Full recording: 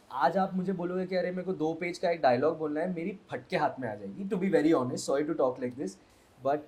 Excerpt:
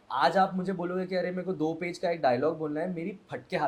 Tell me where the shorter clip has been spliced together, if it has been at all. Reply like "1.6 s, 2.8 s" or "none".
none